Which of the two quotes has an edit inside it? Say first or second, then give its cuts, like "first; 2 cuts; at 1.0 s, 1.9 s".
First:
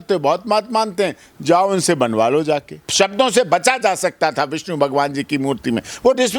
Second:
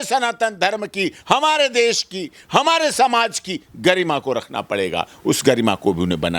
first; 1 cut; at 2.8 s